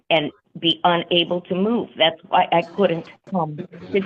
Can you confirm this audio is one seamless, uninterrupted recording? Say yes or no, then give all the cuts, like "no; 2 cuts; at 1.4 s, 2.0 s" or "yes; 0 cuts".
no; 1 cut; at 3.1 s